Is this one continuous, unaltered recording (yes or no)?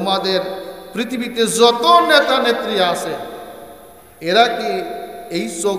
yes